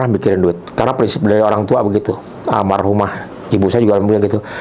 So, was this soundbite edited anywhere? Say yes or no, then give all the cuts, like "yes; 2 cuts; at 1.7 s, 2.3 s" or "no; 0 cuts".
no; 0 cuts